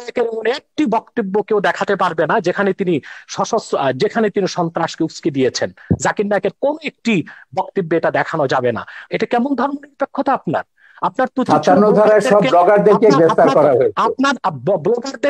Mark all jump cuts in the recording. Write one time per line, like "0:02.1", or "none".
0:09.0